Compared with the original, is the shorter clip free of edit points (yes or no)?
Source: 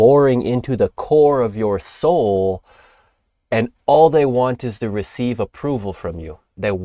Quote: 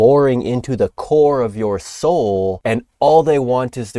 no